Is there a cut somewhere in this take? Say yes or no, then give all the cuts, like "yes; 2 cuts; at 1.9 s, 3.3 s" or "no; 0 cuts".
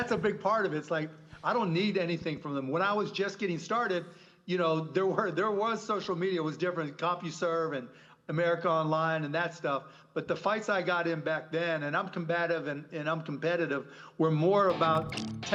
no; 0 cuts